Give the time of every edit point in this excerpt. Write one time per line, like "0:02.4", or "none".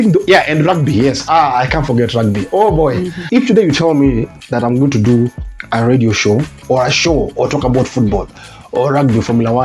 0:03.1

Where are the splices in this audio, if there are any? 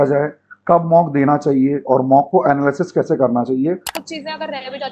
0:03.9

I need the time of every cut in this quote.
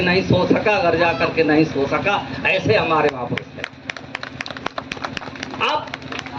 none

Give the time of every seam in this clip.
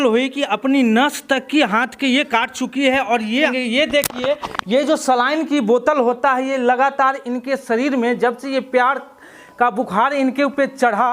0:03.5

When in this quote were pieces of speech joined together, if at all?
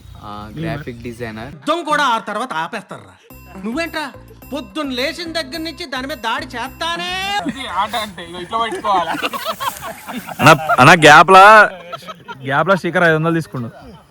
0:01.5
0:07.4

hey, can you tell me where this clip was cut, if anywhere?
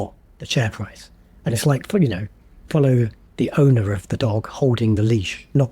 0:03.2

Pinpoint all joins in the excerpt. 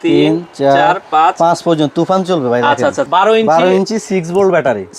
0:03.0

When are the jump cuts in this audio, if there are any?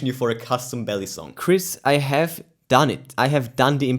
0:01.3
0:03.0

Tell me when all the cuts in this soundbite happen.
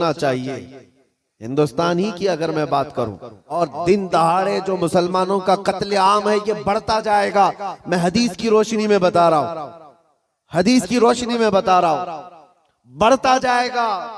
0:03.6

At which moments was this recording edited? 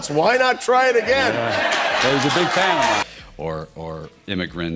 0:03.1

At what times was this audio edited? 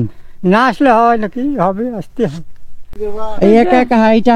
0:02.9

